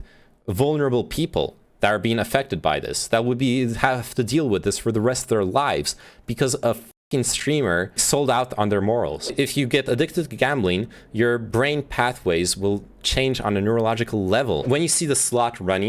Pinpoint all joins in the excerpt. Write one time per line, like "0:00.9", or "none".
0:07.9
0:09.3
0:14.6